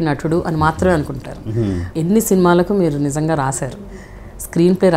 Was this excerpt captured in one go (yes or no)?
no